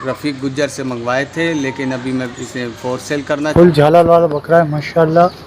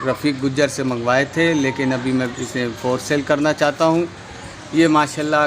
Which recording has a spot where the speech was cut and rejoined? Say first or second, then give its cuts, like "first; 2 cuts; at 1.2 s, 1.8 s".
first; 1 cut; at 3.5 s